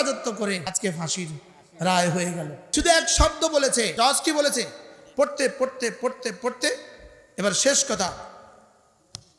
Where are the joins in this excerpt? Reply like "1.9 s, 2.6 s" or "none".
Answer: 0.7 s, 2.6 s, 3.9 s